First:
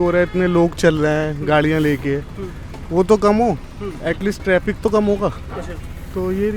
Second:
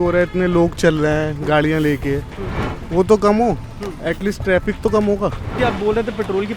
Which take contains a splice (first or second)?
second